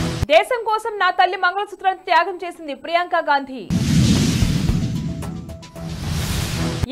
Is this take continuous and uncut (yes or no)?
yes